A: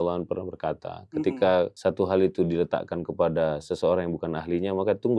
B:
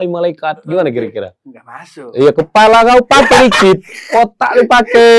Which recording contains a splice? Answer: A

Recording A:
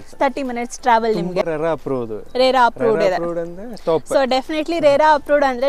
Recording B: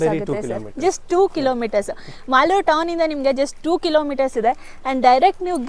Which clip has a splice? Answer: A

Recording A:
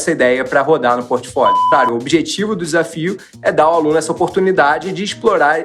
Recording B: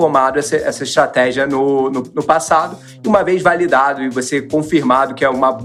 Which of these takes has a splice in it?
A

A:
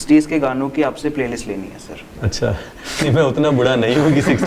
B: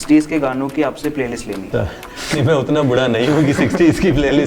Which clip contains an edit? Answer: B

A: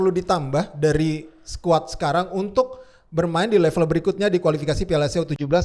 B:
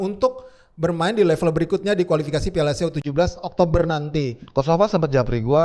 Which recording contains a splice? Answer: B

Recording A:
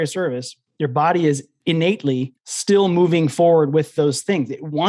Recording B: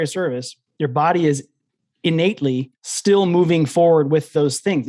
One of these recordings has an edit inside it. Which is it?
A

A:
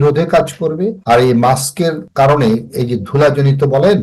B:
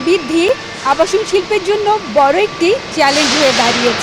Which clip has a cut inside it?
A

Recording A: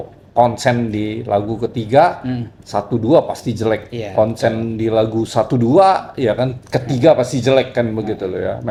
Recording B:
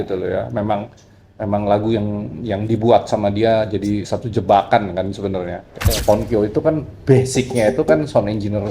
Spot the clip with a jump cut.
B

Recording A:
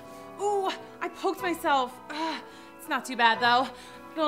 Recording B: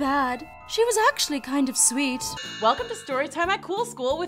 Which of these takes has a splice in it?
B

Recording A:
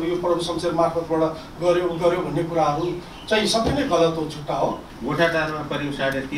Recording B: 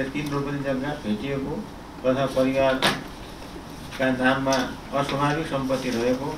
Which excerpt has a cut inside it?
A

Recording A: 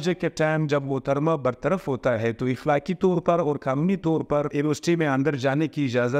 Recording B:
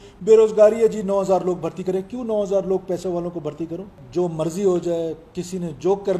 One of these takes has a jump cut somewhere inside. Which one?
A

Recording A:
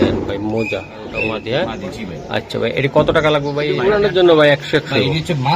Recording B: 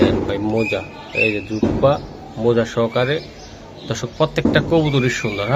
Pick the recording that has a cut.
A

